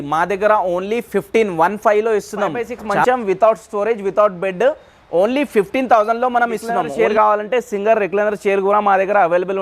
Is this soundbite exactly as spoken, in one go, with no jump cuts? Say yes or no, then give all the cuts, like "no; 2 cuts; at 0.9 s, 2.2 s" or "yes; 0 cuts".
no; 2 cuts; at 3.0 s, 6.8 s